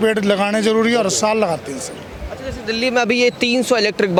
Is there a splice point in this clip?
no; 0 cuts

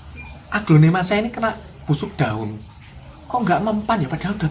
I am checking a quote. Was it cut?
no; 0 cuts

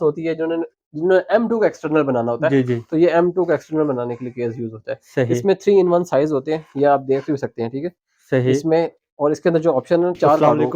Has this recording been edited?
no; 0 cuts

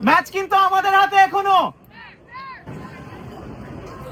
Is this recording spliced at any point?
no; 0 cuts

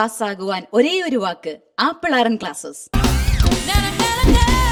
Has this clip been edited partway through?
no; 0 cuts

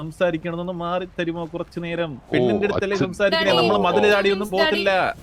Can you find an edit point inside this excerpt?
no; 0 cuts

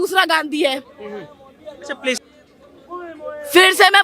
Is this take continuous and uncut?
no; 1 cut; at 2.2 s

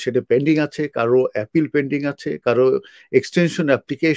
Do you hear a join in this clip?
no; 0 cuts

